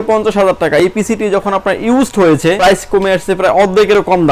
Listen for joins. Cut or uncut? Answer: cut